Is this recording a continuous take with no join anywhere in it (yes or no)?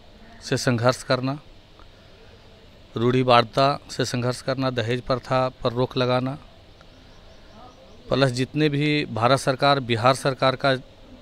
yes